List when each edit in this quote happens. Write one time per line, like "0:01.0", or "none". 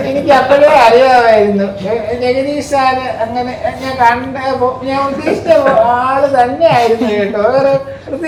none